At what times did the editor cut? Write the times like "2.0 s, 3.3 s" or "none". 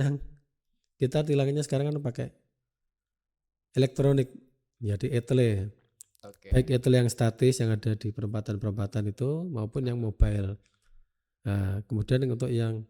none

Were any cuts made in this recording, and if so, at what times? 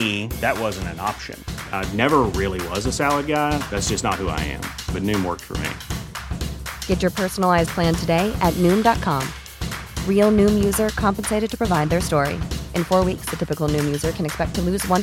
none

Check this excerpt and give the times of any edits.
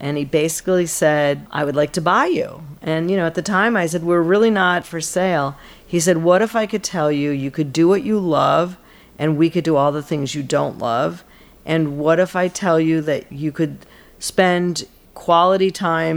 1.5 s, 4.9 s

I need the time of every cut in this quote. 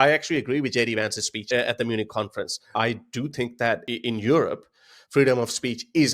2.6 s, 3.9 s

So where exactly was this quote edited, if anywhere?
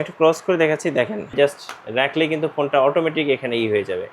1.3 s

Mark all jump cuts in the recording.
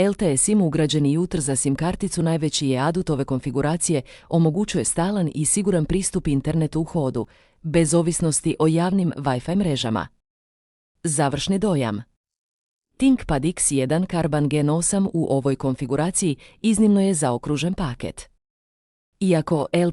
none

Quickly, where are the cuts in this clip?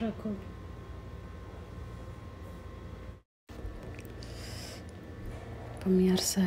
3.2 s

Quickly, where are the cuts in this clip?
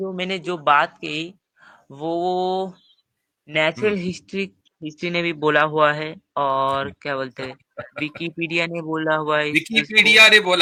none

